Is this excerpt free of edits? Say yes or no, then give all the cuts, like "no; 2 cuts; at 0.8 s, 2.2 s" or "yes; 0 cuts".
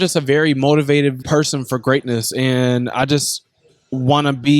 no; 1 cut; at 1.2 s